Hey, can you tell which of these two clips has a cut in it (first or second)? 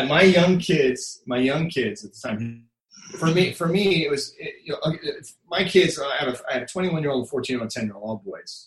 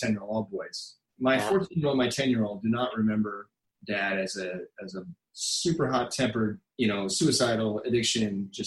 second